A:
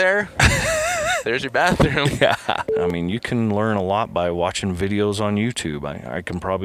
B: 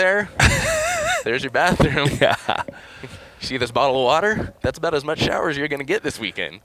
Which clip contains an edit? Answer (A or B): A